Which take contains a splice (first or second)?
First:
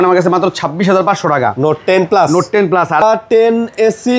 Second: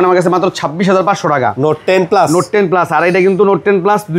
first